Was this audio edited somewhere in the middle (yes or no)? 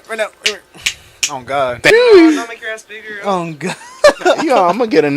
yes